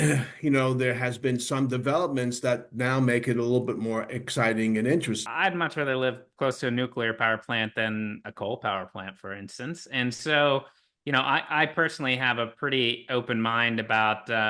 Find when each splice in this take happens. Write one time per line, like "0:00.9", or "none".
0:05.2